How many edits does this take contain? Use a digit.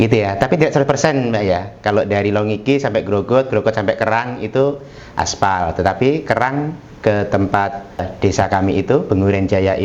1